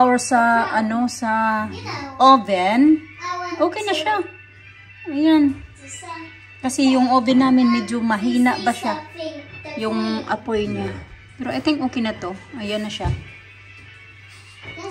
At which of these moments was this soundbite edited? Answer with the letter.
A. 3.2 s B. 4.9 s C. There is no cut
C